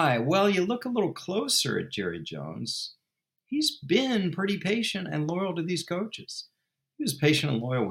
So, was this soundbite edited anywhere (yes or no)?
no